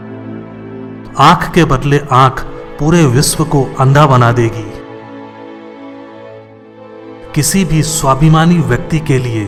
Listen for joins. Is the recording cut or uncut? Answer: uncut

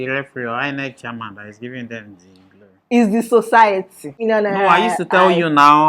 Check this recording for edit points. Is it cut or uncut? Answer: cut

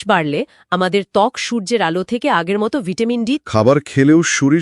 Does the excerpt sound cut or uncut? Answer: cut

